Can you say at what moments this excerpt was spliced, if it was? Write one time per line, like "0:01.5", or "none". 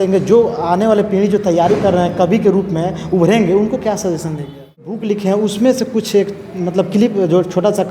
0:05.0